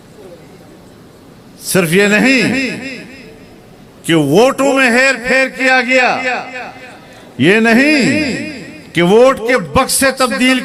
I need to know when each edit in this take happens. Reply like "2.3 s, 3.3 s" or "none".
none